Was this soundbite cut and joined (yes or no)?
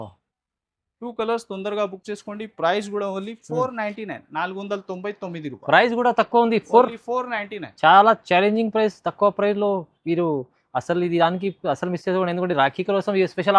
no